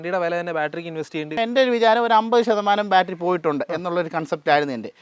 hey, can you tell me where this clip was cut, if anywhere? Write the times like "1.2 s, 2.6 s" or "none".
1.4 s